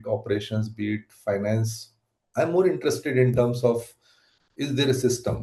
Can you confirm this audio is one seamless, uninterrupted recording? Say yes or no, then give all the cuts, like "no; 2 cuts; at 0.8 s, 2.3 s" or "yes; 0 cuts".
yes; 0 cuts